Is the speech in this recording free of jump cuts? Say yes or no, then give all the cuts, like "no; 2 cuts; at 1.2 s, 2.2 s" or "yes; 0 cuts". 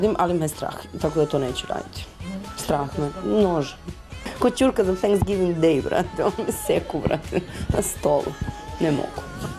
yes; 0 cuts